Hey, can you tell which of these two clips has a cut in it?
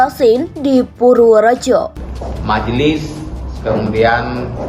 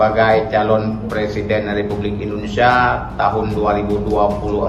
first; 1 cut; at 1.9 s

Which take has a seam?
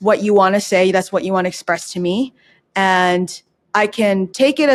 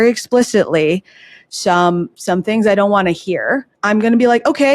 second; 1 cut; at 3.7 s

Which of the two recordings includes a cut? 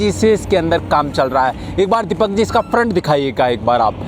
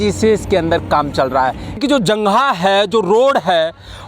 second; 1 cut; at 1.8 s

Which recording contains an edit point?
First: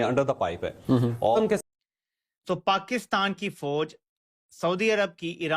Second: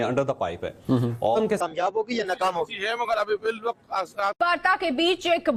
first; 1 cut; at 1.6 s

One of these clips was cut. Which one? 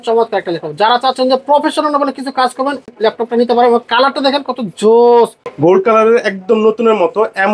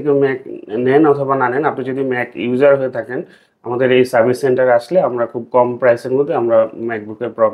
first; 2 cuts; at 2.9 s, 5.4 s

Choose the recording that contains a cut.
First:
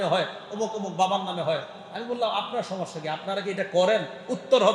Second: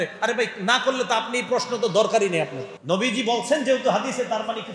second; 1 cut; at 2.7 s

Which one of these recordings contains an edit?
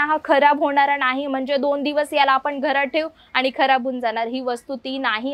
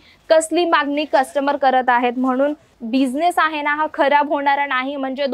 second; 1 cut; at 2.7 s

